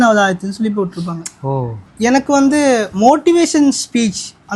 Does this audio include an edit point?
yes; 1 cut; at 1.8 s

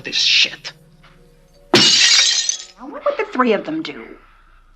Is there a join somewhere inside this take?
yes; 1 cut; at 3.0 s

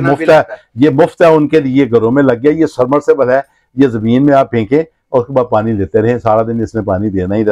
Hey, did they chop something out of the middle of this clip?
no; 0 cuts

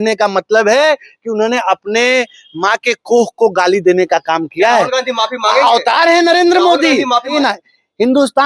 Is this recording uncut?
no; 1 cut; at 7.3 s

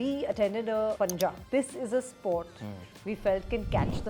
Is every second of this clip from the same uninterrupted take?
no; 1 cut; at 1.0 s

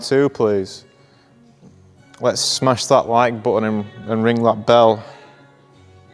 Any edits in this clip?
no; 0 cuts

